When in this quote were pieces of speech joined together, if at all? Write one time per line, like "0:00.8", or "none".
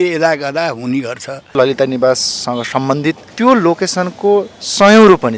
0:01.5
0:03.3